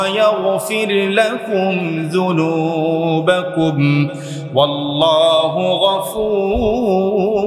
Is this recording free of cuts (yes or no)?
yes